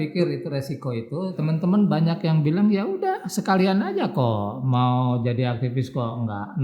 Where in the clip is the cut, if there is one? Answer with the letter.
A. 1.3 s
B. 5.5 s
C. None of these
A